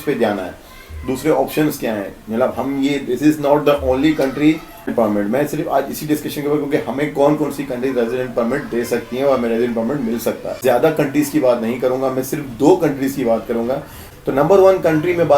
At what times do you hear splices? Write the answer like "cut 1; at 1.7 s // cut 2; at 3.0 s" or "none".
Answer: cut 1; at 4.9 s // cut 2; at 10.6 s // cut 3; at 14.0 s